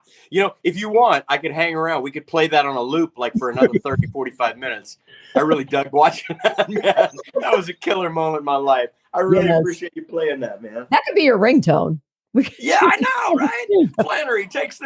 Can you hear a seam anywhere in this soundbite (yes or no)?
no